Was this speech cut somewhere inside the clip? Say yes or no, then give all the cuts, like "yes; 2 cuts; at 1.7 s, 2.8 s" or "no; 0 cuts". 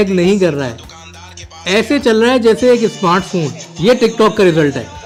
no; 0 cuts